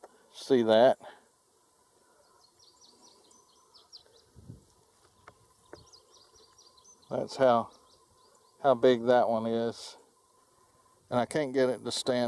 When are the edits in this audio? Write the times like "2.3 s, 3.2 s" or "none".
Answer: 5.1 s